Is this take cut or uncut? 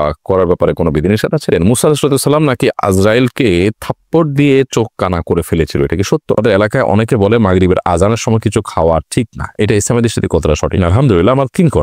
cut